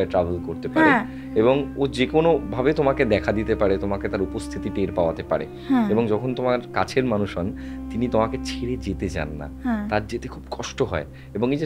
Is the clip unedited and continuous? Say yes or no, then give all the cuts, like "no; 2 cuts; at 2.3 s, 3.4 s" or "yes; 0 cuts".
yes; 0 cuts